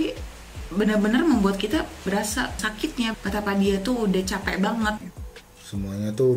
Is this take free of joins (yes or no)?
no